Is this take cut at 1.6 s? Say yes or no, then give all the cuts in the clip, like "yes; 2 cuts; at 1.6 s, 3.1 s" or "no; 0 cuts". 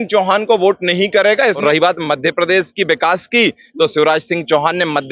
yes; 1 cut; at 1.6 s